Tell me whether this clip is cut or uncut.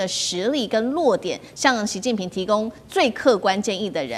uncut